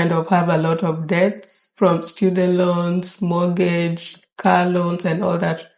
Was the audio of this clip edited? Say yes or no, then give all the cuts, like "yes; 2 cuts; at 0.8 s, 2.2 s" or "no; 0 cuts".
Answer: no; 0 cuts